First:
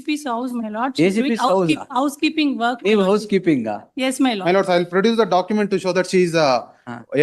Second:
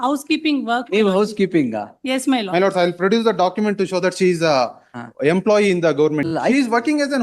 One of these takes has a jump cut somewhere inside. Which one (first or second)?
second